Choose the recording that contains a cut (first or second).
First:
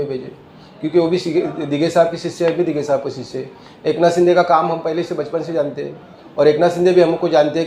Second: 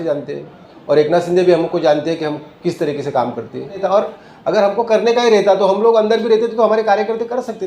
second